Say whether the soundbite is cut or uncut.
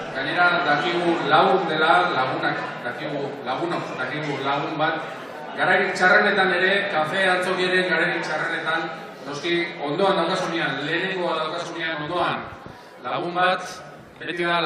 cut